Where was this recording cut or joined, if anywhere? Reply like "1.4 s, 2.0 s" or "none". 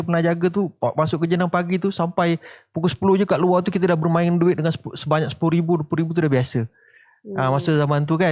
none